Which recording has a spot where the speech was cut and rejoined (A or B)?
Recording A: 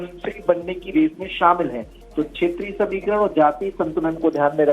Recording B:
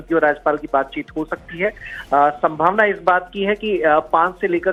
A